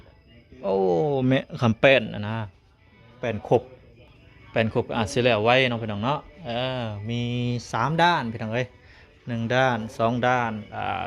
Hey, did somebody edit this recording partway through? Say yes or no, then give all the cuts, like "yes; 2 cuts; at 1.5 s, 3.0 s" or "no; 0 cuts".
no; 0 cuts